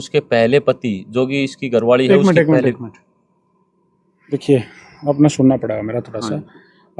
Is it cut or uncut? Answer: uncut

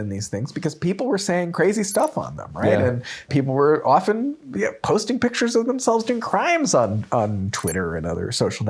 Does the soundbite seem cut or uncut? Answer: cut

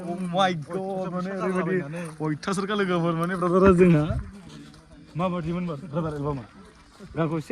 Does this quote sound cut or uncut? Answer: uncut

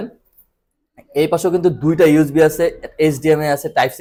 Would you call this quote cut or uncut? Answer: uncut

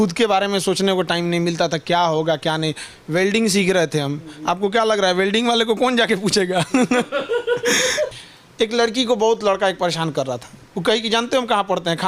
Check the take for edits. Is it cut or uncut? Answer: cut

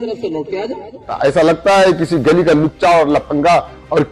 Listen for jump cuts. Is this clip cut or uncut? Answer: cut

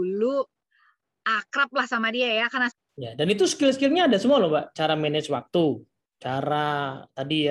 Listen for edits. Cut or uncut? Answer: cut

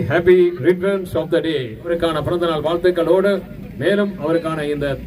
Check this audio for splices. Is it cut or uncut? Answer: cut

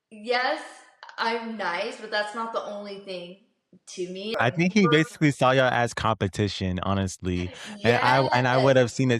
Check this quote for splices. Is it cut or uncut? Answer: cut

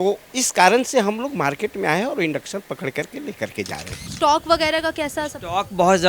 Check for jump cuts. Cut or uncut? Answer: cut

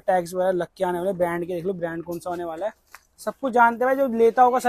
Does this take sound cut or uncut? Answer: uncut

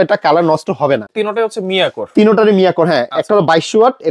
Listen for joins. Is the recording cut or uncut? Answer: cut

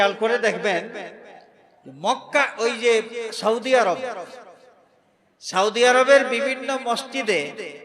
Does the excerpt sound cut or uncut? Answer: uncut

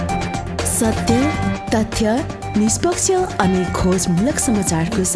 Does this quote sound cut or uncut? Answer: uncut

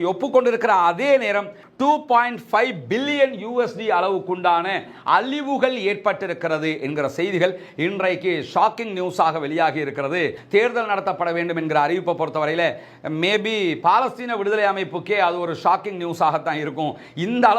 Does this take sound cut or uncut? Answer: cut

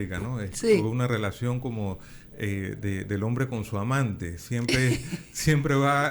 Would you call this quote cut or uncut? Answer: uncut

